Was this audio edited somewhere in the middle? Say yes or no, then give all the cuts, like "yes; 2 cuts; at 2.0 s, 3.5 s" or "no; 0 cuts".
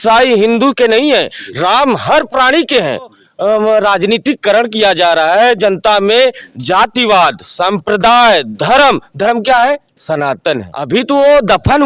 yes; 2 cuts; at 3.2 s, 10.7 s